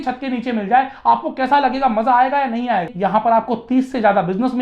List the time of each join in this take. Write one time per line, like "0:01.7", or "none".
0:02.9